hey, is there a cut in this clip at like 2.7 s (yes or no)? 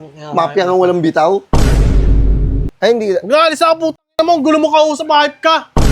yes